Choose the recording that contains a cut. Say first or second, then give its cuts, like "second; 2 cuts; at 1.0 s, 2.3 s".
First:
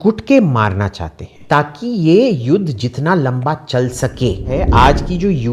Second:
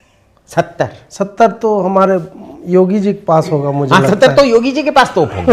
first; 2 cuts; at 1.4 s, 4.5 s